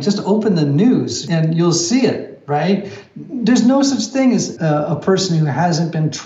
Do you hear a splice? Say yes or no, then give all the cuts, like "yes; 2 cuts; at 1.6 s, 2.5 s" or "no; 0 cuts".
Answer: yes; 2 cuts; at 1.2 s, 4.5 s